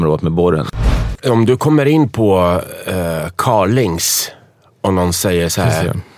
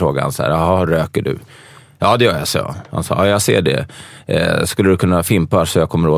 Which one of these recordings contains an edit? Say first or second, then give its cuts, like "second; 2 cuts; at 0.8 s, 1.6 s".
first; 1 cut; at 1.2 s